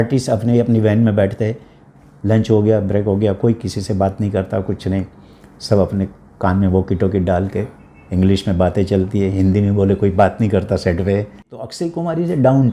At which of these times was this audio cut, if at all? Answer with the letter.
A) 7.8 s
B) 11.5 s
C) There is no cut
B